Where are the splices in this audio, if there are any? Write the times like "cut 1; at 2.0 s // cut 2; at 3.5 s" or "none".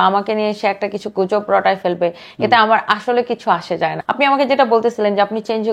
cut 1; at 4.0 s